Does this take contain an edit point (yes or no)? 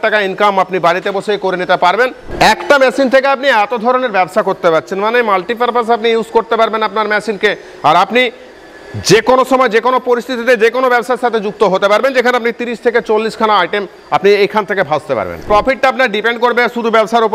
yes